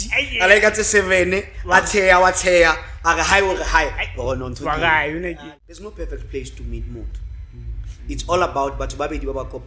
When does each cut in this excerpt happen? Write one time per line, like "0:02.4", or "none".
0:05.4